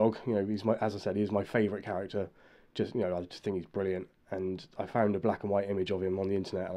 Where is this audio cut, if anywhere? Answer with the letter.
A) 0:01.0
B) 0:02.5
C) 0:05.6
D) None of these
D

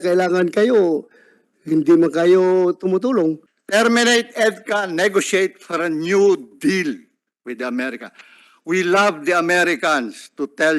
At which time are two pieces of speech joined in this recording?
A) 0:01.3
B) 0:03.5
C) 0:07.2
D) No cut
B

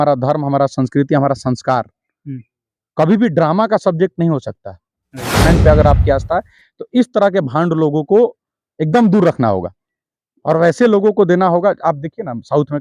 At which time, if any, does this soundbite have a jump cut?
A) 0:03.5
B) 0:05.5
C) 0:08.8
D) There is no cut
B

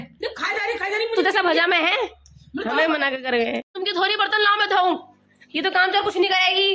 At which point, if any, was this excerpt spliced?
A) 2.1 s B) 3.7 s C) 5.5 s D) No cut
B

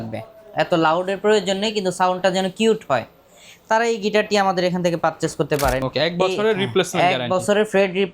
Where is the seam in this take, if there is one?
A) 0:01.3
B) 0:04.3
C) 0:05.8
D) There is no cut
C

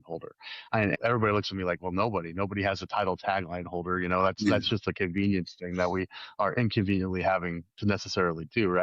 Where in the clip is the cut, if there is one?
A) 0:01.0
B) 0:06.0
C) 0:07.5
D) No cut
A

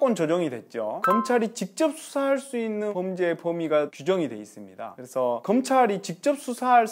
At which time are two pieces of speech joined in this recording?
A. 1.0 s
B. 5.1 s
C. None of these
A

